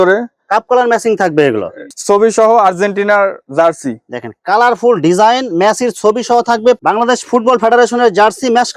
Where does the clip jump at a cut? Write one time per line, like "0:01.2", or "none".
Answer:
0:01.9
0:06.8